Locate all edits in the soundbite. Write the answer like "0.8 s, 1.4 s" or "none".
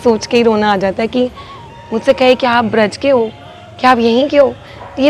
1.7 s